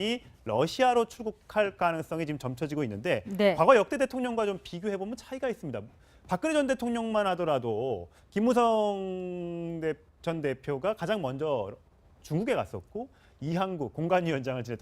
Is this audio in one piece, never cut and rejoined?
no; 1 cut; at 1.2 s

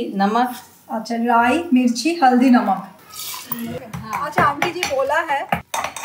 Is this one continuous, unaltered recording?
no; 1 cut; at 3.5 s

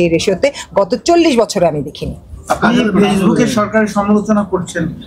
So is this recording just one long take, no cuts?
yes; 0 cuts

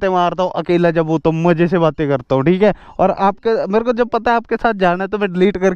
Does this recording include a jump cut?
no; 0 cuts

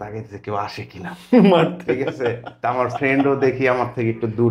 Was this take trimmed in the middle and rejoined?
no; 0 cuts

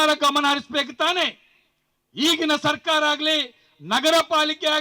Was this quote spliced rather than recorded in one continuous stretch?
no; 0 cuts

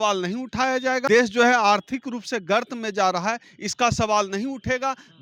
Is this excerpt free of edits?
no; 1 cut; at 1.0 s

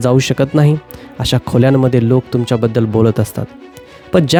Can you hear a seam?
no; 0 cuts

